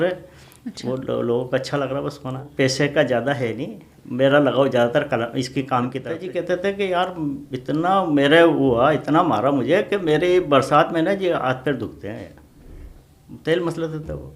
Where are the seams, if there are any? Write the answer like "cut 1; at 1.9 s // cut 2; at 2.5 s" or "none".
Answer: cut 1; at 2.4 s // cut 2; at 6.1 s